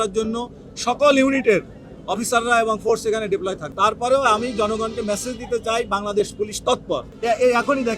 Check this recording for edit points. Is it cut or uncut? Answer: cut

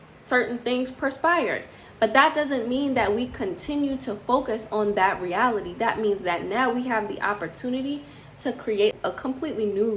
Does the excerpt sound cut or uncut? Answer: cut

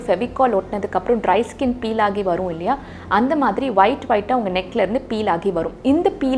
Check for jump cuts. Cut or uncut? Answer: uncut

